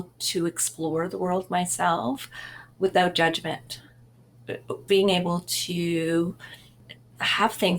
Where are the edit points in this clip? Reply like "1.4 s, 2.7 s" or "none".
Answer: none